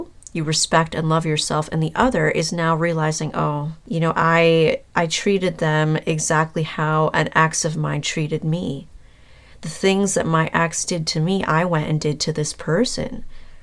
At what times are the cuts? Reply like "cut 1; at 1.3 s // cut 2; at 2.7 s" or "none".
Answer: cut 1; at 3.7 s